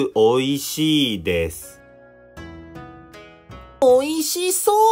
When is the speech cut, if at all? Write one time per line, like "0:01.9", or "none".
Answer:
0:01.7
0:03.7